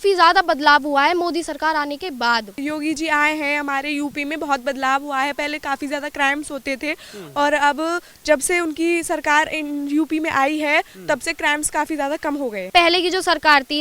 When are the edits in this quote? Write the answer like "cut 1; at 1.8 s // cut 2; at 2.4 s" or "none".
cut 1; at 2.5 s // cut 2; at 12.7 s